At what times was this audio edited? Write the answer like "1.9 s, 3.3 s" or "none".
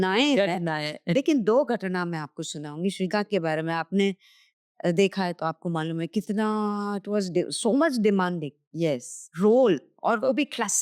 none